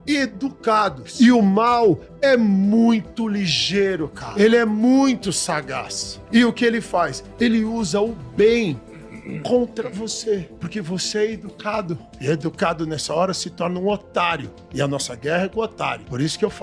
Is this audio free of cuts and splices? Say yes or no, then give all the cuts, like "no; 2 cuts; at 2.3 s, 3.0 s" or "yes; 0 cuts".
no; 2 cuts; at 1.0 s, 4.2 s